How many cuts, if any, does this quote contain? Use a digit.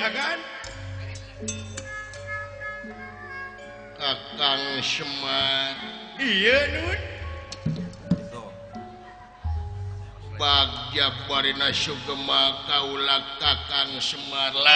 0